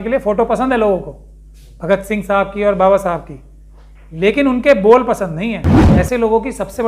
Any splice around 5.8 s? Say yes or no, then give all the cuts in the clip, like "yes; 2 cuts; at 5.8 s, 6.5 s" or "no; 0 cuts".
yes; 1 cut; at 5.8 s